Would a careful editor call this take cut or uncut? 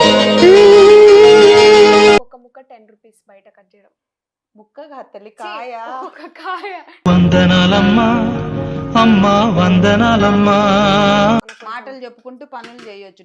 cut